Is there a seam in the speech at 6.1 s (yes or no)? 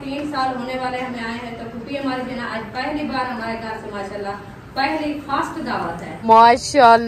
yes